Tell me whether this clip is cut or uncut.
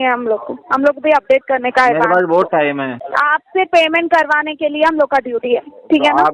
cut